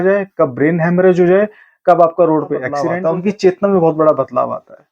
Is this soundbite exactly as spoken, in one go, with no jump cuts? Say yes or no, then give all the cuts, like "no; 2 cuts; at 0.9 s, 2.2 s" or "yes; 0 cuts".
no; 1 cut; at 2.8 s